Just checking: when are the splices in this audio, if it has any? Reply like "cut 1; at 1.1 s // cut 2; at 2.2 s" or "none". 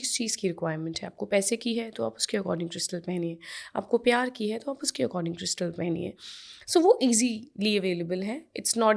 none